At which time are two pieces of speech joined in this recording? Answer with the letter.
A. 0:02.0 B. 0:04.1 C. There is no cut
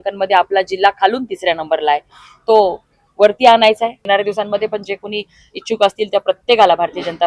B